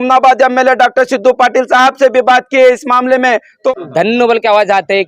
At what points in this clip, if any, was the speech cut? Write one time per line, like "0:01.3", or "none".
0:03.6